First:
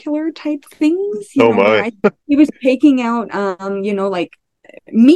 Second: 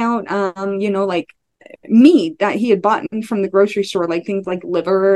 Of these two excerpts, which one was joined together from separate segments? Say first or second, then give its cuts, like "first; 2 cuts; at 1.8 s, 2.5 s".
first; 1 cut; at 1.9 s